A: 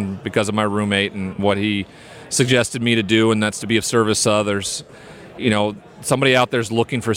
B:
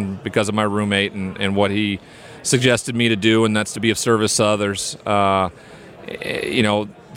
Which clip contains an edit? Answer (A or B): A